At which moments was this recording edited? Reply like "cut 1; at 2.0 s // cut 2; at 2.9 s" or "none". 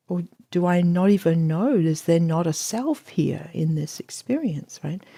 none